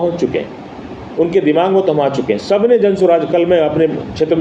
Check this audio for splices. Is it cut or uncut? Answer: uncut